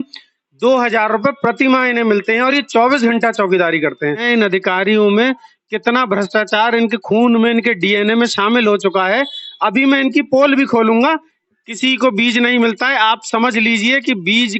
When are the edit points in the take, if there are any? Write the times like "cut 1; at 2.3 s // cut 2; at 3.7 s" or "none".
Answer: cut 1; at 4.2 s // cut 2; at 11.3 s